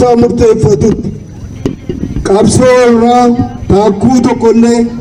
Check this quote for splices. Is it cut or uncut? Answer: uncut